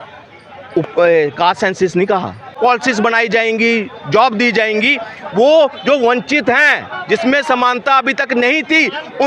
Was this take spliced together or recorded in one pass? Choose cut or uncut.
cut